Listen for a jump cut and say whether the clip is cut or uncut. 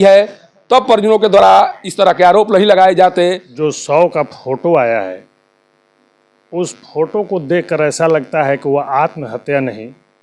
cut